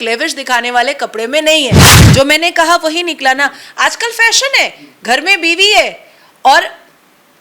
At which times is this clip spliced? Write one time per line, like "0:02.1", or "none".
0:01.9